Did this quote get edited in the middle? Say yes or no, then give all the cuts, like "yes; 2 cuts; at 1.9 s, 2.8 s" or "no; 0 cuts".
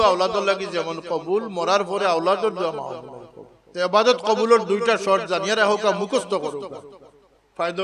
yes; 1 cut; at 3.7 s